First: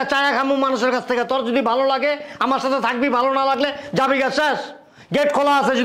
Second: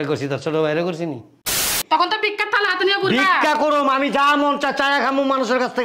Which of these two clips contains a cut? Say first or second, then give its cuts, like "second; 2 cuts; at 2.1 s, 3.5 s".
second; 1 cut; at 1.8 s